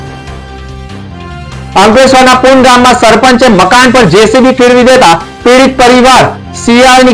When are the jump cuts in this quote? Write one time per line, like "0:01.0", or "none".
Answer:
0:01.7